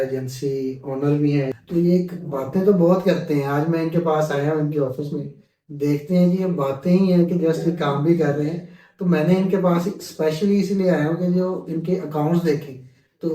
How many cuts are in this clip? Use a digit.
1